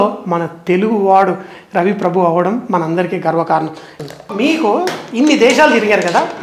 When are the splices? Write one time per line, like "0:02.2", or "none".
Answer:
0:04.0